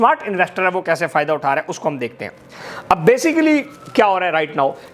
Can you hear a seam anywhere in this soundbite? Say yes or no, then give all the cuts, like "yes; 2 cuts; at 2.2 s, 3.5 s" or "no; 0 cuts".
no; 0 cuts